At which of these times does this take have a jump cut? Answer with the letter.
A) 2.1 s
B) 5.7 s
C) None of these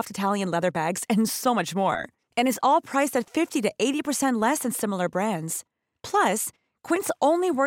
C